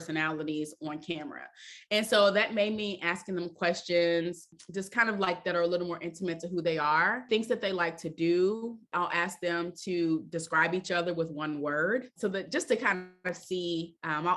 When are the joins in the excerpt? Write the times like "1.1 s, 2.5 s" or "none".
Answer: 4.6 s, 7.2 s, 8.9 s, 12.1 s